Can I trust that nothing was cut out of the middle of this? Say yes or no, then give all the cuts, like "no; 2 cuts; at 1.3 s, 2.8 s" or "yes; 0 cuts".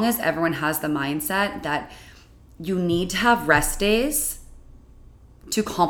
yes; 0 cuts